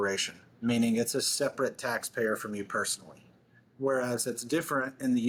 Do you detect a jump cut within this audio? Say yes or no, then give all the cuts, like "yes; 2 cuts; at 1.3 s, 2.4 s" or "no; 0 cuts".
no; 0 cuts